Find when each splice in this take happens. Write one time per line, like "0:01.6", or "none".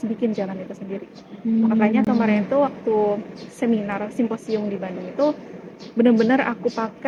none